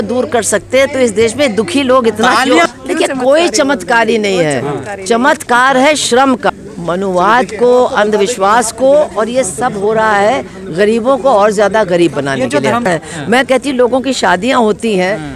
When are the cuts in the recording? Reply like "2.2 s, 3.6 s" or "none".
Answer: 2.7 s, 6.5 s, 12.9 s